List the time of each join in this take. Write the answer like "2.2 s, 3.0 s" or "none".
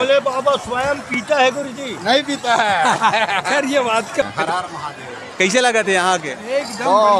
4.2 s